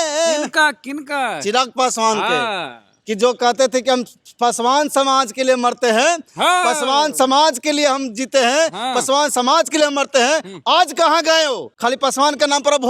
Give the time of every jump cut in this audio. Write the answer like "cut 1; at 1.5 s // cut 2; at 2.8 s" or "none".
cut 1; at 11.7 s